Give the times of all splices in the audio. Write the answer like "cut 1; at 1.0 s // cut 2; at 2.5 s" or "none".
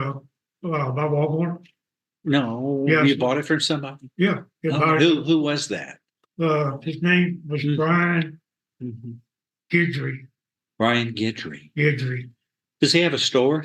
none